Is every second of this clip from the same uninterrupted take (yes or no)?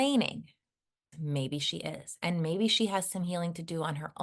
no